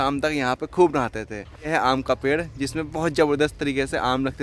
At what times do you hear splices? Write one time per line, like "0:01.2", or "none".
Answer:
0:01.7